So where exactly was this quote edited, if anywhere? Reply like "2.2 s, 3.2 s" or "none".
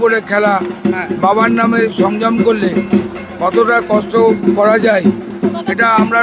none